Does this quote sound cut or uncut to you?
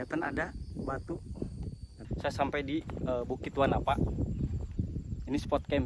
cut